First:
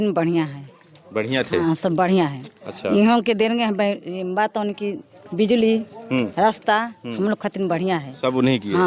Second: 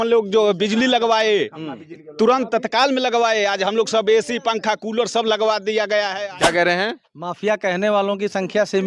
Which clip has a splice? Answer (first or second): second